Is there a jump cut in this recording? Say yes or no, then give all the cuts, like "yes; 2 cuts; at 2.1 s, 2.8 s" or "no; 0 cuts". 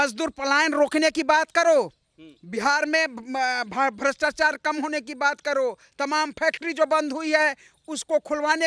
no; 0 cuts